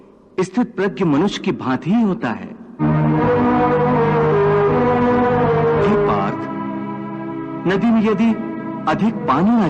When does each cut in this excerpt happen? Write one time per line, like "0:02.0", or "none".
none